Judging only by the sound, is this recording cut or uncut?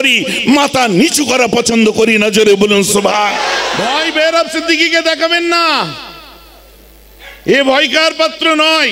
cut